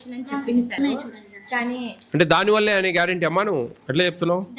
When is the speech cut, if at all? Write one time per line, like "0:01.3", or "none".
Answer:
0:01.2